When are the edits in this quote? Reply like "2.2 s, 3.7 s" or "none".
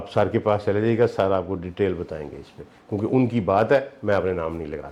none